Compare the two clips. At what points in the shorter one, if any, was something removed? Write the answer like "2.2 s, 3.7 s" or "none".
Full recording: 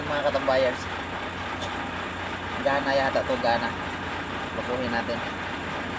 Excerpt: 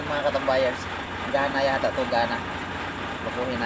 1.1 s